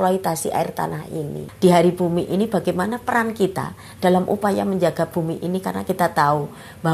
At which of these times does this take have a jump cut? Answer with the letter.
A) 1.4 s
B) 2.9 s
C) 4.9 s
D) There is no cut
A